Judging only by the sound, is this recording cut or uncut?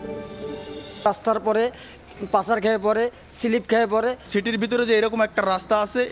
cut